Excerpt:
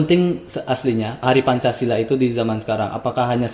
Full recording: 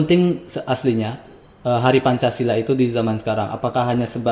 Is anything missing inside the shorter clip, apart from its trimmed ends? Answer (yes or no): yes